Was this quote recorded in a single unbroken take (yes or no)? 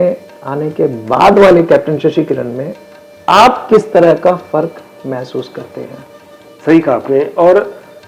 yes